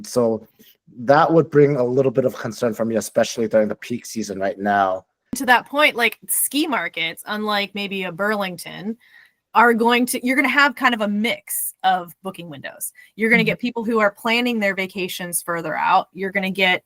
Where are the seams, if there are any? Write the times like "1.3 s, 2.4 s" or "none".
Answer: 5.4 s